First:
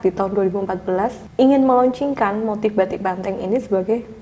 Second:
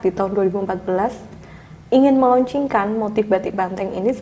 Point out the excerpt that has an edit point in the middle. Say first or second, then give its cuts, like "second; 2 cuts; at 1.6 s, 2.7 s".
first; 1 cut; at 1.2 s